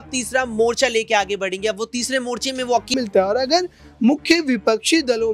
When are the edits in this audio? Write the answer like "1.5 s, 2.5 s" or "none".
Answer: 2.9 s